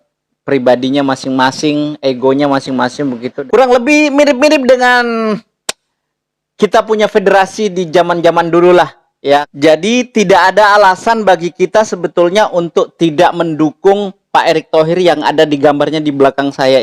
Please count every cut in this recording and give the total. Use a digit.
2